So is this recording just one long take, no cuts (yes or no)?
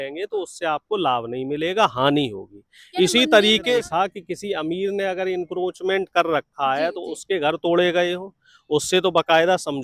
no